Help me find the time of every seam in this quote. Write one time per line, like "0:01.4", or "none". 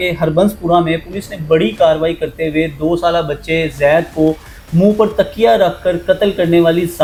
none